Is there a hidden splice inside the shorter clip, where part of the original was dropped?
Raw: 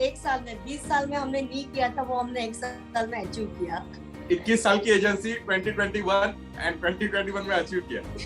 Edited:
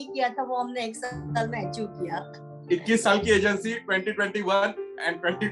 no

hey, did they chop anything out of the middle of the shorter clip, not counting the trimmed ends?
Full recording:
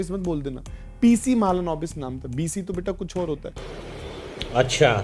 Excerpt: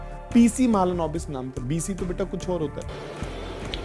no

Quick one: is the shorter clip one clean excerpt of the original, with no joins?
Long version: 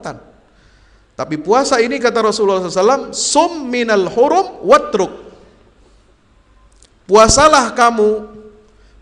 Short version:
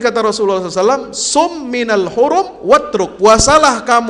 no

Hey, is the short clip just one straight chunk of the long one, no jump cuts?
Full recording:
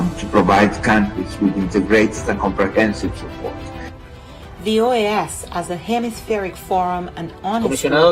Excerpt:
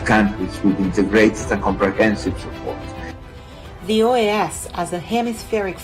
yes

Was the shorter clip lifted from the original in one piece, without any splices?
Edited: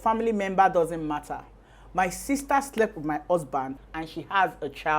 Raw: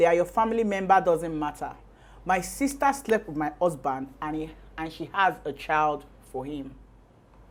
no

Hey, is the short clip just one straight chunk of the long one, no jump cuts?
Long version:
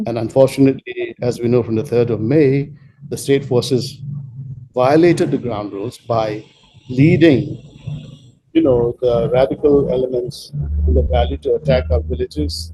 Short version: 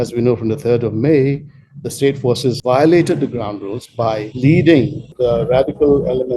no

